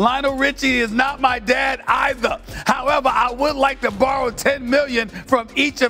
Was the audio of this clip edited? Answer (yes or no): no